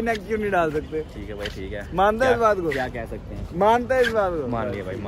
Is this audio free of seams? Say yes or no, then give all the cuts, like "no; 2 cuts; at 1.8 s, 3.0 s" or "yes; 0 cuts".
yes; 0 cuts